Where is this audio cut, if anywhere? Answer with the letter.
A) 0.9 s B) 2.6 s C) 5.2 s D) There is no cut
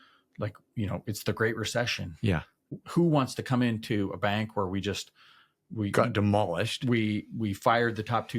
B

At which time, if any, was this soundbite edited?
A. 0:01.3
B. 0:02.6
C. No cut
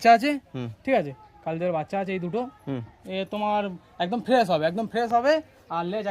C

